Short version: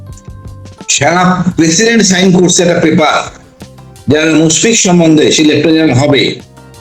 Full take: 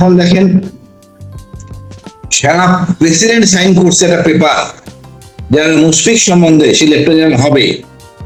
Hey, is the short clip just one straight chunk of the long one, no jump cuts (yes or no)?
no